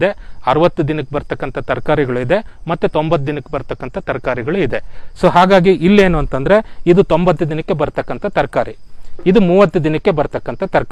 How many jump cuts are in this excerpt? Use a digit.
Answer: 0